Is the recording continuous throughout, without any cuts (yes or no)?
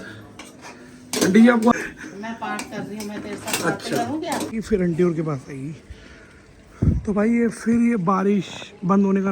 no